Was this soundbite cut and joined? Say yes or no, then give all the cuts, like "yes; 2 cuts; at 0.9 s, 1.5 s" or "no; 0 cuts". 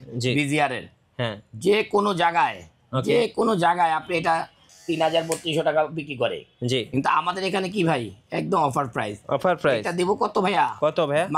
no; 0 cuts